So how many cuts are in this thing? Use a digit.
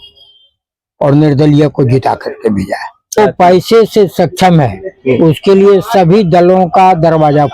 1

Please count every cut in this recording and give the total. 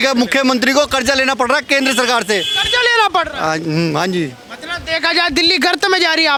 0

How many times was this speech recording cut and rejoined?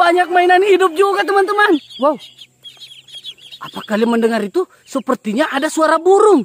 1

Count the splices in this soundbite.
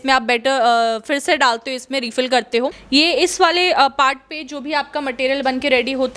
1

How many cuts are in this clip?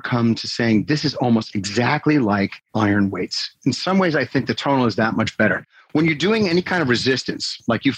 2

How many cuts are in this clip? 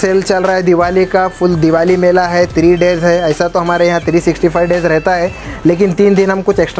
0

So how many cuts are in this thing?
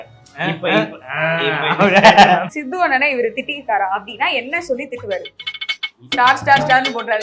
1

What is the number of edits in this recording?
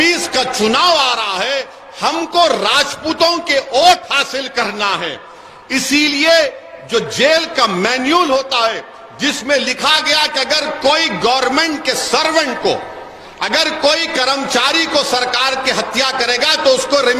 0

